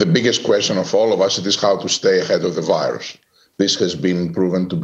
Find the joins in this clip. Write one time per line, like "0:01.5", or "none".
none